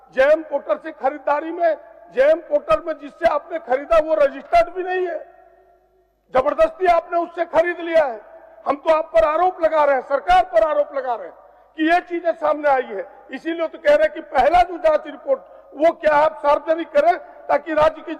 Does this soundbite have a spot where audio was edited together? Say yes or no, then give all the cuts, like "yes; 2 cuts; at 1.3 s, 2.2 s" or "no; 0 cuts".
no; 0 cuts